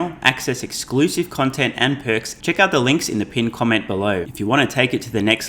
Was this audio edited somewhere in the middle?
yes; 2 cuts; at 2.3 s, 4.3 s

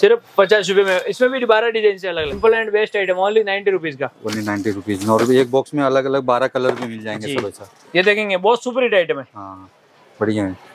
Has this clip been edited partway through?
yes; 1 cut; at 2.4 s

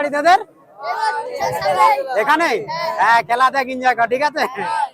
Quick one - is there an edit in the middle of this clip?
no; 0 cuts

